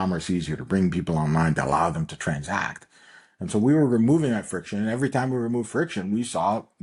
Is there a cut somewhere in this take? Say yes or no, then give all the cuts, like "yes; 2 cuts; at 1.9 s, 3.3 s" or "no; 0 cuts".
no; 0 cuts